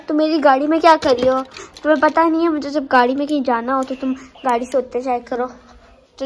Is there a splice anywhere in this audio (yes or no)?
no